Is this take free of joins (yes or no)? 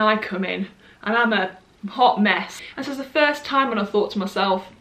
no